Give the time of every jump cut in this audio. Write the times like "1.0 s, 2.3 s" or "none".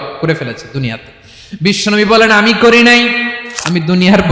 3.4 s